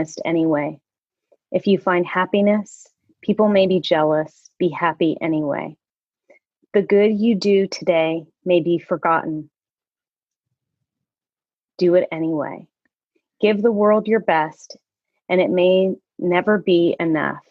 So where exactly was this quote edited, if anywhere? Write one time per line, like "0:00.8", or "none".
none